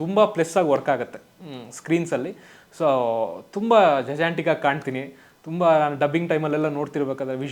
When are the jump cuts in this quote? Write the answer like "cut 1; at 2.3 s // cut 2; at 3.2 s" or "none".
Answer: none